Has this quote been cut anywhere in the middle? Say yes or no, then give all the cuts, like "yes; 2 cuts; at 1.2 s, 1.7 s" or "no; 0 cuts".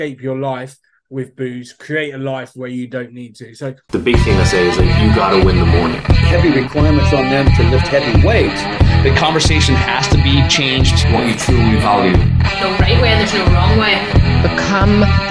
yes; 1 cut; at 3.8 s